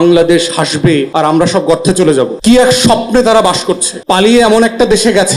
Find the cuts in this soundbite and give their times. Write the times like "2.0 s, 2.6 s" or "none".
1.1 s, 2.3 s, 4.0 s